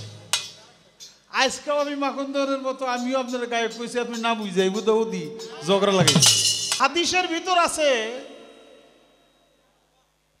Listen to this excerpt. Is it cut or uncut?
cut